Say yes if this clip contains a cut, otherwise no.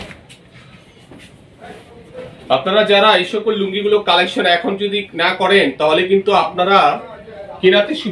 no